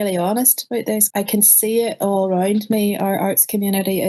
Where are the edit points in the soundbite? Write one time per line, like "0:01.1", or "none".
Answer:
0:01.1